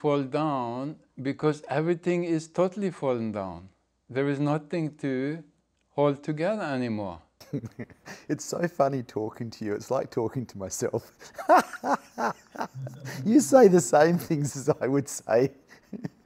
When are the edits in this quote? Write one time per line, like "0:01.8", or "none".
0:07.3